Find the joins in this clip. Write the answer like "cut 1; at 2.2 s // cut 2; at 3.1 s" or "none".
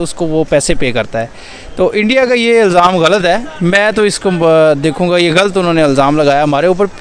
none